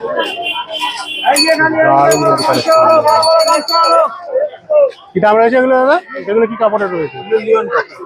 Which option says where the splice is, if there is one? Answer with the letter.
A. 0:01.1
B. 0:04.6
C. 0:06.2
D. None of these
C